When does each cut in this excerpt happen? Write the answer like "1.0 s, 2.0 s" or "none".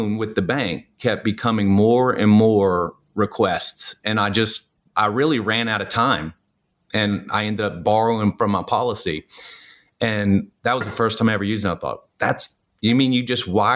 none

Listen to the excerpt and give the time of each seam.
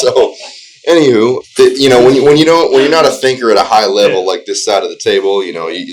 1.4 s

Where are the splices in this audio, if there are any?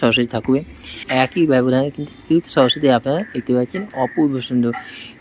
1.0 s

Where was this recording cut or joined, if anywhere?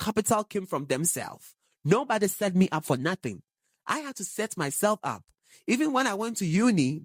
none

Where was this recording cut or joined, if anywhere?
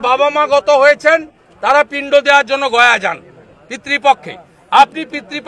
none

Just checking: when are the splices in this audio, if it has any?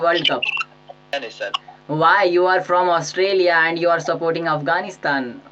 1.1 s

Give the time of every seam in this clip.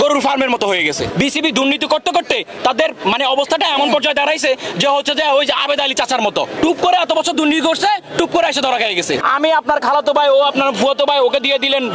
1.0 s, 6.5 s, 9.2 s

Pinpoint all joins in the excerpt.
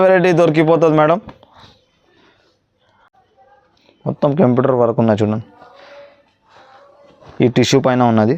3.1 s

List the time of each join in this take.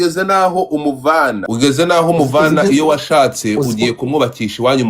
1.4 s

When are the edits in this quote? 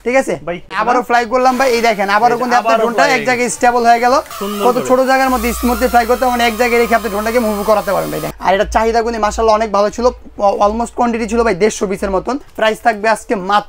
0.8 s, 4.4 s, 8.3 s, 12.5 s

